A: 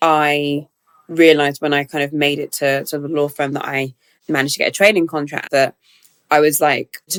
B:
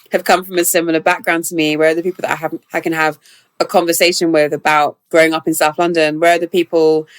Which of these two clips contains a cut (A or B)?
B